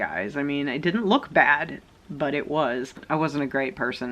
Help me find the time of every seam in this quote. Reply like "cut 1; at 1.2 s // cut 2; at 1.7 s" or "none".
cut 1; at 3.0 s